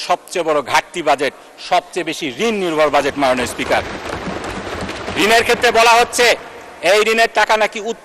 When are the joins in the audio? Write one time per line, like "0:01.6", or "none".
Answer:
none